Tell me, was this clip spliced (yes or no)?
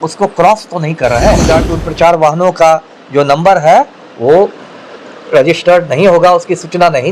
yes